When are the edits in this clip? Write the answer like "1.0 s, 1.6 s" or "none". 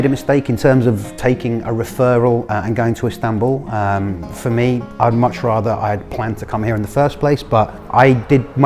none